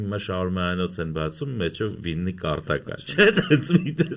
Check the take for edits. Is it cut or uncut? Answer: uncut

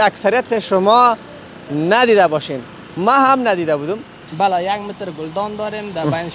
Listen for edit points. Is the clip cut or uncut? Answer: cut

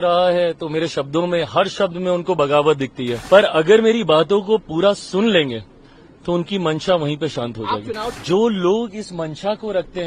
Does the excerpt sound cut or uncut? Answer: cut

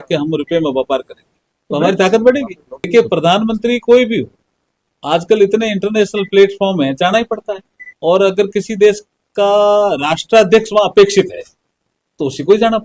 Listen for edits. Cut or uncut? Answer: uncut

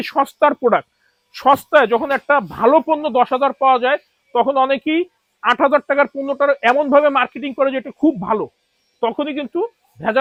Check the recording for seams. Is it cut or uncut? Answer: uncut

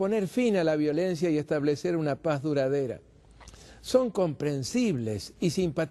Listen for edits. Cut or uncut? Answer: uncut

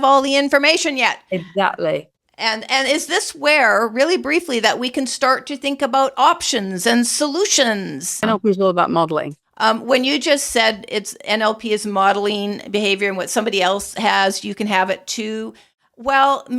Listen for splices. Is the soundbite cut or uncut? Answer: cut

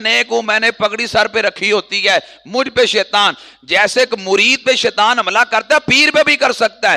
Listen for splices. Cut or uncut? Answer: uncut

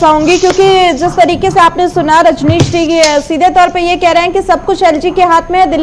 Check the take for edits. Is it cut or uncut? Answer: uncut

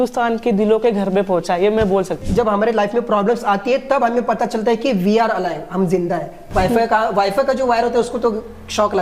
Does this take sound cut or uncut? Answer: cut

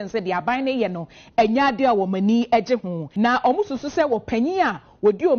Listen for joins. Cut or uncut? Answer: cut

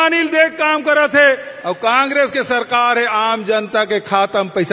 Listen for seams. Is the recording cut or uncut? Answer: uncut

